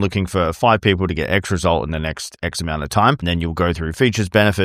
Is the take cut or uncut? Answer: cut